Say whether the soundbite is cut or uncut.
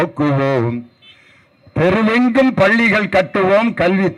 uncut